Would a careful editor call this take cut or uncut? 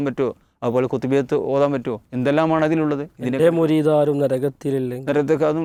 uncut